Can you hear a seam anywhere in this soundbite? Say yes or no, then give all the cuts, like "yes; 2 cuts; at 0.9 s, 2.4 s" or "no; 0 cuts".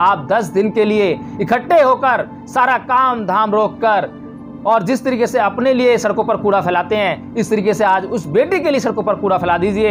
no; 0 cuts